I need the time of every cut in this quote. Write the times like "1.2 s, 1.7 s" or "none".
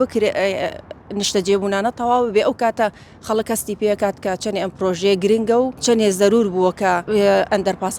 5.8 s, 7.0 s

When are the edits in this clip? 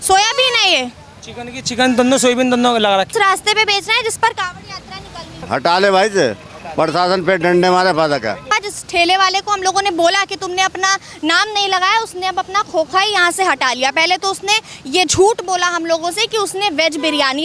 3.1 s, 5.4 s, 8.5 s

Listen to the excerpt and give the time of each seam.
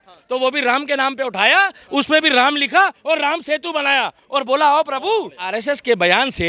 5.5 s

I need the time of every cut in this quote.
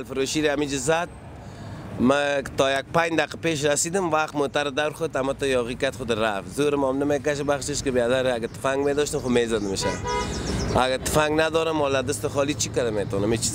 none

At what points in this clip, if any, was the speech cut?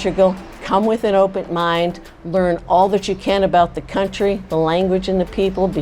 none

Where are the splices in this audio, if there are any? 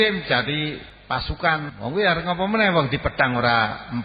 0.9 s, 1.7 s

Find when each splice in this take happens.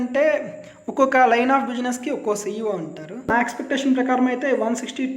3.3 s

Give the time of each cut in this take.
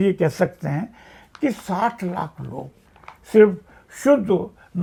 none

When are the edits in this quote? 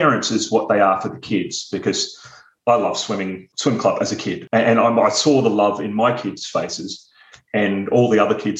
2.5 s, 3.5 s, 4.4 s

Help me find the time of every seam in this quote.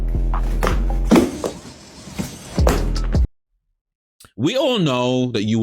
3.2 s

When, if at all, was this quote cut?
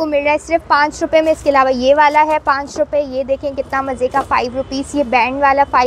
none

